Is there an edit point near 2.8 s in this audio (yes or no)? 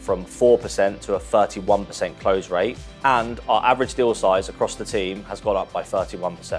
no